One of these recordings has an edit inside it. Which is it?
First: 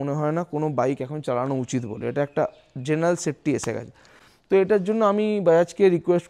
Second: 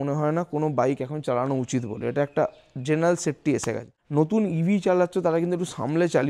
second; 1 cut; at 4.0 s

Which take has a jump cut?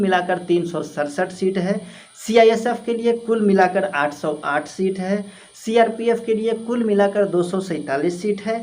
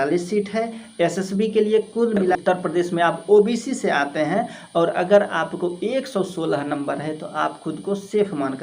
second; 1 cut; at 2.3 s

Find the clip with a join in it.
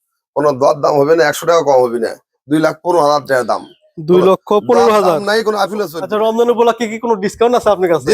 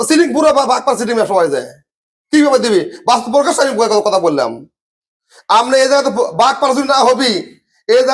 first; 1 cut; at 6.0 s

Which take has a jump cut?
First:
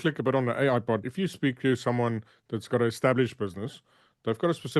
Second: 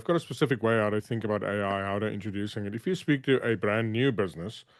first; 1 cut; at 1.1 s

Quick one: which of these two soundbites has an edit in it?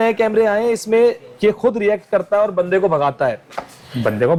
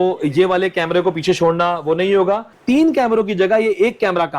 second; 1 cut; at 2.5 s

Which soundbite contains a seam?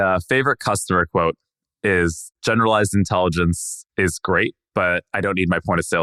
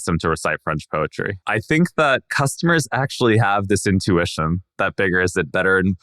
second; 2 cuts; at 1.4 s, 2.3 s

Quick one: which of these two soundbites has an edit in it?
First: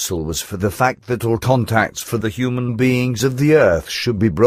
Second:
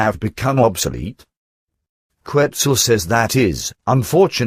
second; 1 cut; at 3.5 s

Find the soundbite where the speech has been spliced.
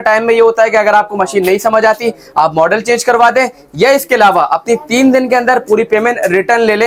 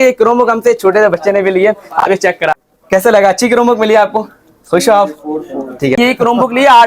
second; 2 cuts; at 2.5 s, 6.0 s

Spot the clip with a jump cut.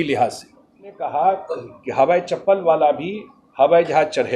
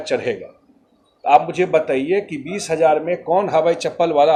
first; 1 cut; at 1.0 s

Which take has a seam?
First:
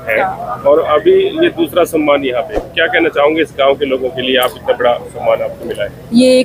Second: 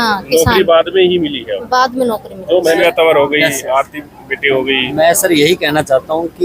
second; 1 cut; at 2.8 s

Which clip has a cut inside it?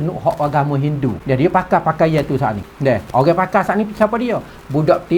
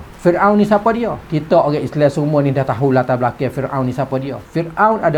first; 2 cuts; at 1.2 s, 2.7 s

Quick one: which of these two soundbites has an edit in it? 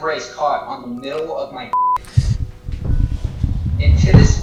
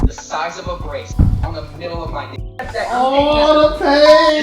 second; 2 cuts; at 1.1 s, 2.7 s

